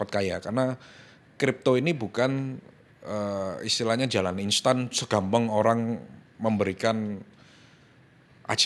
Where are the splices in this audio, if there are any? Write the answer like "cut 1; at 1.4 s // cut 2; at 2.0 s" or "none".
none